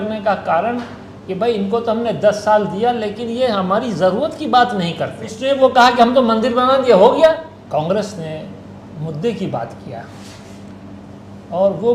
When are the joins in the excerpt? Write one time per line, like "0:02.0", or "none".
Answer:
0:05.4
0:07.5